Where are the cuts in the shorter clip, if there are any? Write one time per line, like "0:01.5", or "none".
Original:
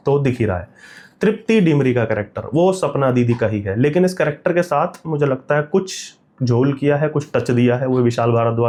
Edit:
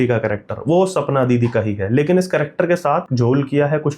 0:03.1